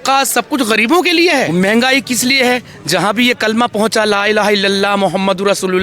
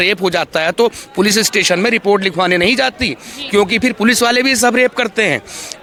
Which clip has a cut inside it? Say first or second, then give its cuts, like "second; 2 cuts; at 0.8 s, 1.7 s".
first; 1 cut; at 1.5 s